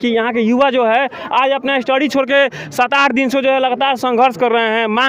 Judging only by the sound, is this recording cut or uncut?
uncut